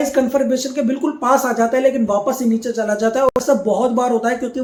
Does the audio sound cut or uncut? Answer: uncut